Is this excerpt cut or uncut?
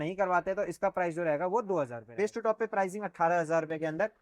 cut